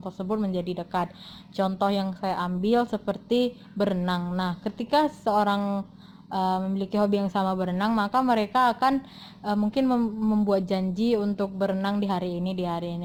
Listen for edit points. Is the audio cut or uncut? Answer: uncut